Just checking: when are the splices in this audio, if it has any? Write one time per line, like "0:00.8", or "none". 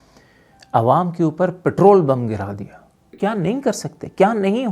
0:03.0